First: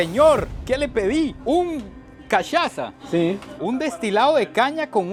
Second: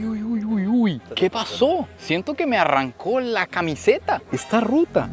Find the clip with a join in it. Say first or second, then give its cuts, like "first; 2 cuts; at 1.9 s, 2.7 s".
second; 1 cut; at 1.1 s